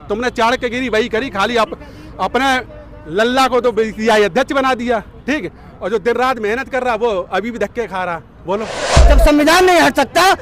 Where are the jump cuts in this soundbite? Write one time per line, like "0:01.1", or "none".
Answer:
0:08.8